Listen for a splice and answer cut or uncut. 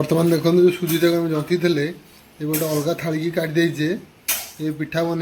uncut